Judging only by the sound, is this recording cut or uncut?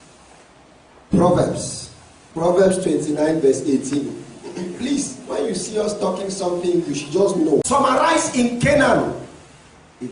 cut